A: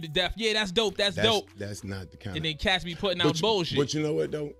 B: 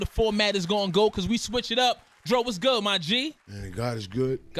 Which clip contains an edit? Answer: B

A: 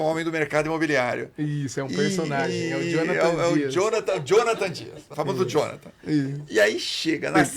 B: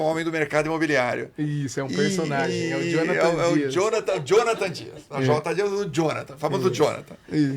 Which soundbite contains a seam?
A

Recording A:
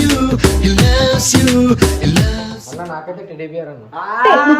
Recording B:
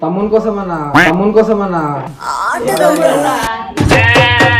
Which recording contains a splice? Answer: A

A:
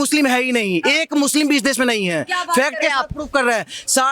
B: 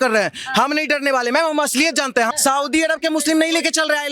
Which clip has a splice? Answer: B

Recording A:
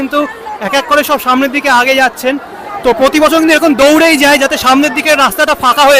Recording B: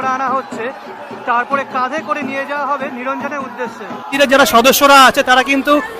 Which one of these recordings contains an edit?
B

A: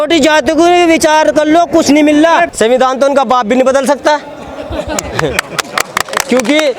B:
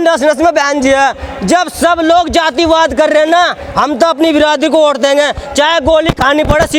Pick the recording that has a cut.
A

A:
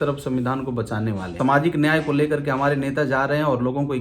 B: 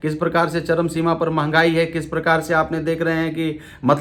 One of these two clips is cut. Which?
A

